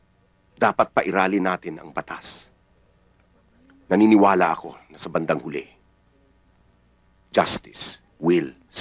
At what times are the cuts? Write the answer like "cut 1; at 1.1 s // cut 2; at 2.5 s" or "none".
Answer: none